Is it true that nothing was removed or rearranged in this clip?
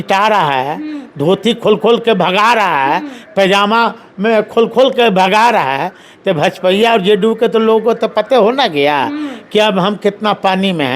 yes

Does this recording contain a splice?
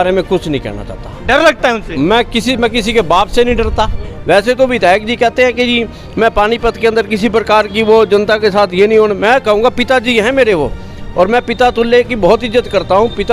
yes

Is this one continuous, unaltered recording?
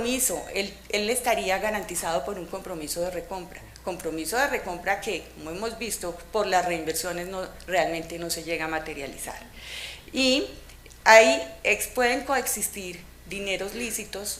yes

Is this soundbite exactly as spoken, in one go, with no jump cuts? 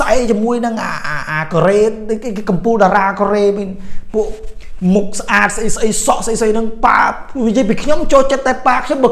yes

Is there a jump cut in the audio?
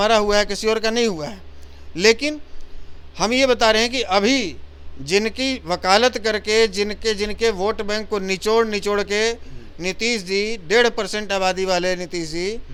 no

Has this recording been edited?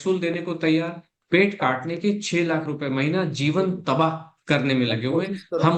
yes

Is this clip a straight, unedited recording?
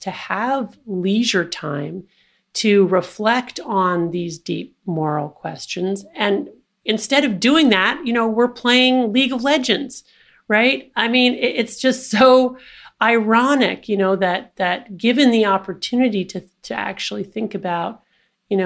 yes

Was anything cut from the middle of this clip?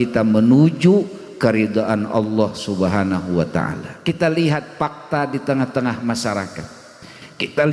yes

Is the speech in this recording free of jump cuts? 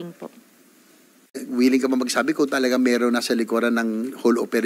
no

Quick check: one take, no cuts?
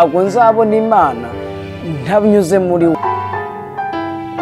no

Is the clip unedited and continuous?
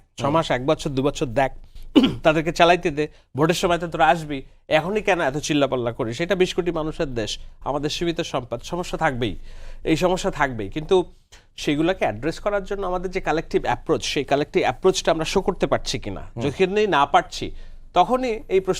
yes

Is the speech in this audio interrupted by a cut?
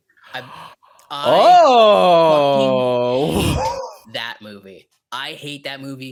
no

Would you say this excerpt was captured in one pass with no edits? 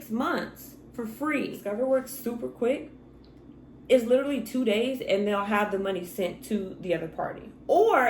no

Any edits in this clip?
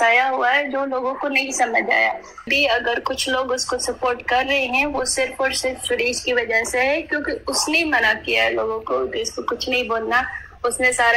yes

